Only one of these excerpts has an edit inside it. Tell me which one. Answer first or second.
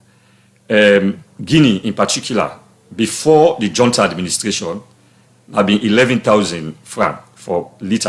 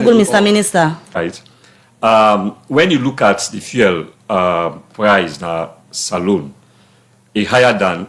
second